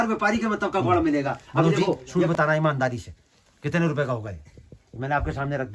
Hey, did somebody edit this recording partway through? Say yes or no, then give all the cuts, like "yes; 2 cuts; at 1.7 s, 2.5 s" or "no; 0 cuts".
yes; 1 cut; at 2.1 s